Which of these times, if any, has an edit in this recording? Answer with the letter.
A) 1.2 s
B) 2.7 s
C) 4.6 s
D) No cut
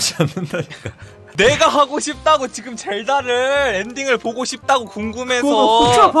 D